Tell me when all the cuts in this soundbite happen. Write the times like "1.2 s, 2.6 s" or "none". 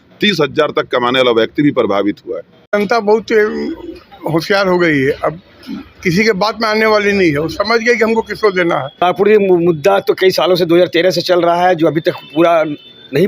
2.7 s, 9.0 s